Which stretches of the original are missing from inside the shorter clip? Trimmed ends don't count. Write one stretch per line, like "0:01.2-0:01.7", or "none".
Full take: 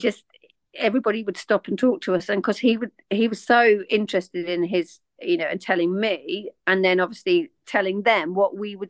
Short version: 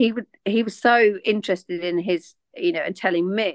none